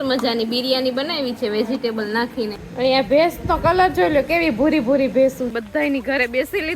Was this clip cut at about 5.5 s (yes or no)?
yes